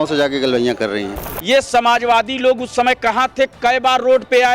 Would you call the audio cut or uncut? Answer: cut